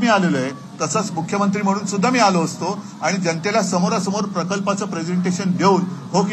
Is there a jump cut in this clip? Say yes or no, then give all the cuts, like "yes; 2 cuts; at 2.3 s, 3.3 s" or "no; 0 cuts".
no; 0 cuts